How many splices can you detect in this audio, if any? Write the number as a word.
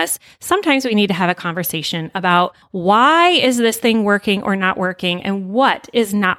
one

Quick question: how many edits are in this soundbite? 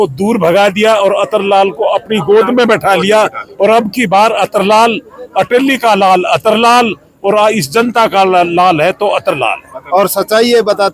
one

